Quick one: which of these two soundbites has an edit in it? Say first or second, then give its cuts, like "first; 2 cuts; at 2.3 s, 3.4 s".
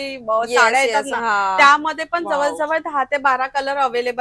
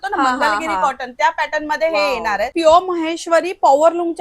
second; 1 cut; at 2.5 s